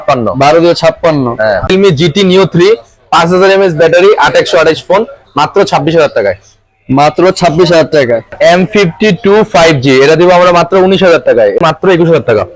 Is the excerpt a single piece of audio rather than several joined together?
no; 3 cuts; at 1.7 s, 8.3 s, 11.6 s

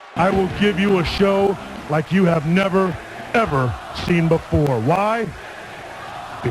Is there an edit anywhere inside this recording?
no; 0 cuts

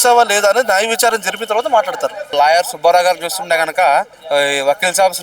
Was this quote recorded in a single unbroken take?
no; 2 cuts; at 2.3 s, 4.2 s

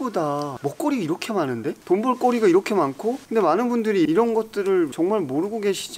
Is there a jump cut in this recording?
yes; 2 cuts; at 1.8 s, 3.2 s

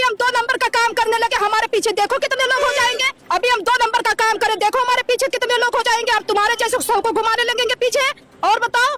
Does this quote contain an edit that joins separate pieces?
no; 0 cuts

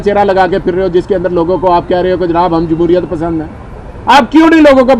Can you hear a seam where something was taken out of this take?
no; 0 cuts

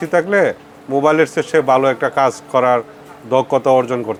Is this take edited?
no; 0 cuts

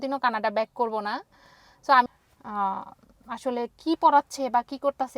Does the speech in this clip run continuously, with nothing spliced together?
no; 1 cut; at 2.1 s

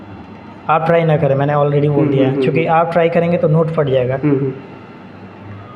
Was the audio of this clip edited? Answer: no; 0 cuts

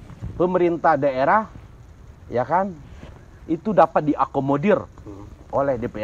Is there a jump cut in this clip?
no; 0 cuts

